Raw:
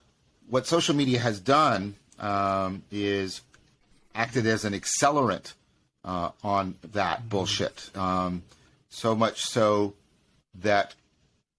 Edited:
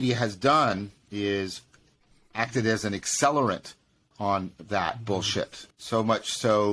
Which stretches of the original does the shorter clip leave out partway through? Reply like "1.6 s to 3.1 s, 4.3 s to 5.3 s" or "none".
2.1 s to 2.8 s, 5.9 s to 6.4 s, 7.8 s to 8.7 s